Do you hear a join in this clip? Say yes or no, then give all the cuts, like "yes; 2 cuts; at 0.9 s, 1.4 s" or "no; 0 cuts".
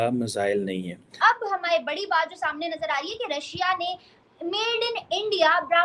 yes; 1 cut; at 1.1 s